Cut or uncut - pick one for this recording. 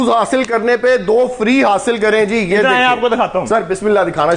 uncut